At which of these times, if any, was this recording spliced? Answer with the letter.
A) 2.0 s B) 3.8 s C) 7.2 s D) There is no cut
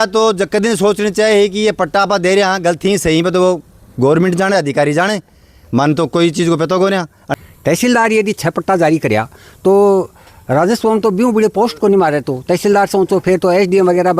C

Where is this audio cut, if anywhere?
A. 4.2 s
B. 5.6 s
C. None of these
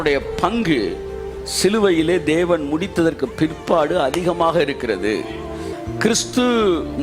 B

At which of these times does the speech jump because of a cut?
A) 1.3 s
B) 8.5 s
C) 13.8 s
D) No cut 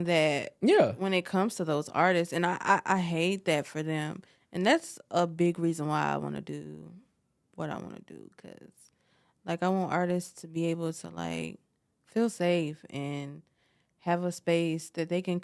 D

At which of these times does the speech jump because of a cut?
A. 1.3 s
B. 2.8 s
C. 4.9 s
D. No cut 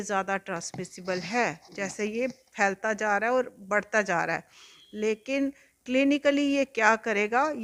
D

